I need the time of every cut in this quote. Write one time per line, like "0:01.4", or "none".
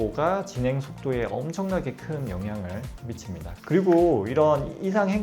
0:03.6